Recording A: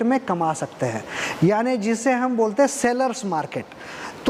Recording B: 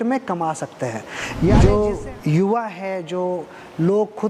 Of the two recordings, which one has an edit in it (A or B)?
B